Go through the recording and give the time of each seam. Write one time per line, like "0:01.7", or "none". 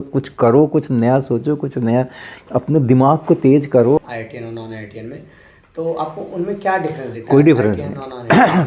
0:04.0